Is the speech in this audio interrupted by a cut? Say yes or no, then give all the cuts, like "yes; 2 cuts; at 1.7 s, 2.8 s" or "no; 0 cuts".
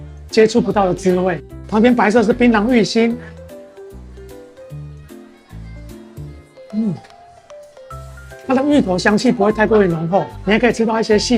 no; 0 cuts